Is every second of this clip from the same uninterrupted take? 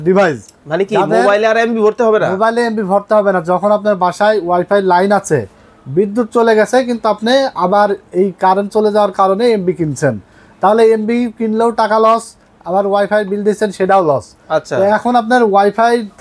yes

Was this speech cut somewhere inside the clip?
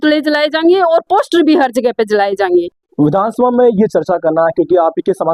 yes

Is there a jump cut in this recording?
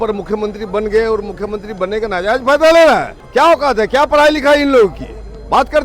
yes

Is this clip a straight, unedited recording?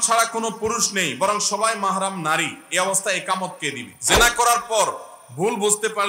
no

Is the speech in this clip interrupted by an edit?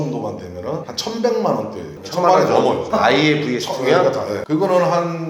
yes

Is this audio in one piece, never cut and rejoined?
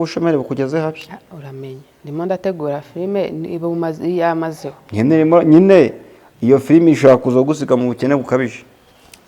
yes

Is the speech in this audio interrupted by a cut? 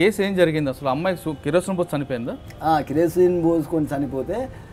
no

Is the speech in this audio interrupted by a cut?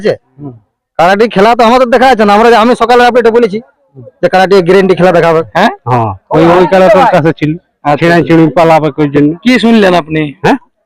yes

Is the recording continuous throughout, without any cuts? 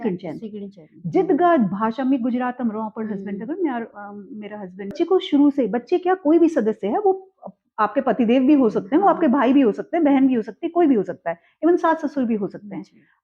no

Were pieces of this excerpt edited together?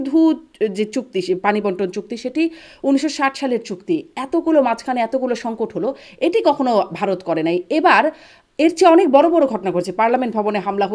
no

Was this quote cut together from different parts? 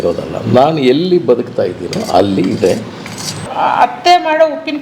yes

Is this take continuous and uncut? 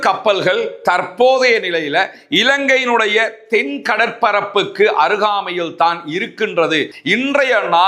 no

